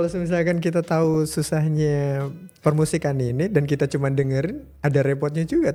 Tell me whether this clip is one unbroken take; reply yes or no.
yes